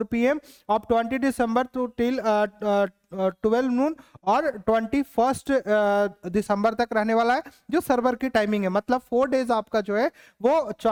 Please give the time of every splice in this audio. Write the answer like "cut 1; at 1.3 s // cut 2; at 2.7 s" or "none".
none